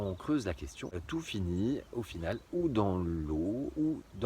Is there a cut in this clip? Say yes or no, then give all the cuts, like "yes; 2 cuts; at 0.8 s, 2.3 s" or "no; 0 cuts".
yes; 1 cut; at 0.9 s